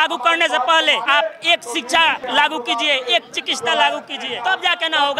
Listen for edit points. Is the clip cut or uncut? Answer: cut